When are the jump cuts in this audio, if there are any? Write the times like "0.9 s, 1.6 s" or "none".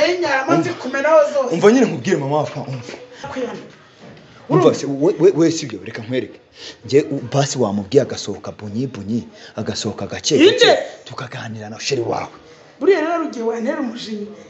3.3 s